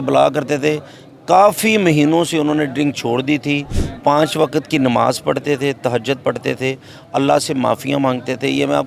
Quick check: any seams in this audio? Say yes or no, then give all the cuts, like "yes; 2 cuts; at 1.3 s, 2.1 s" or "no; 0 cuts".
no; 0 cuts